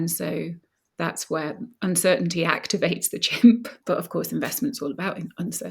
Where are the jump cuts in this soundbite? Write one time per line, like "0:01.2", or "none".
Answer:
0:03.7